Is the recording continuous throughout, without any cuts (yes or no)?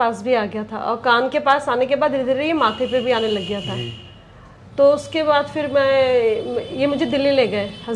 yes